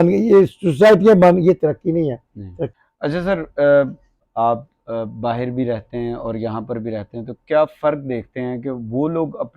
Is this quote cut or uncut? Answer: cut